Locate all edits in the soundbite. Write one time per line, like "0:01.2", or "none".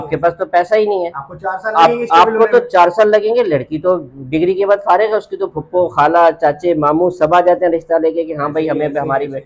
none